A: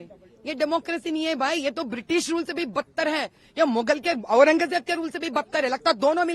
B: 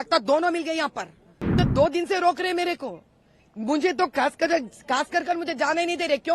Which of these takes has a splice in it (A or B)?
B